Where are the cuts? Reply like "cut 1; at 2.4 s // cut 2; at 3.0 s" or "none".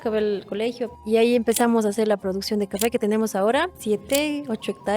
cut 1; at 0.9 s // cut 2; at 3.8 s